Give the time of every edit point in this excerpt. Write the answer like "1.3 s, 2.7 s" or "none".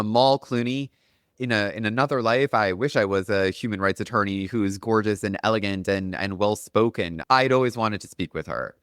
none